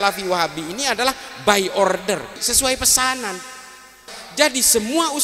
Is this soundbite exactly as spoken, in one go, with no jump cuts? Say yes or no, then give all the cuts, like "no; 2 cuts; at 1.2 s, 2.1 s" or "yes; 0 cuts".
no; 2 cuts; at 2.4 s, 4.1 s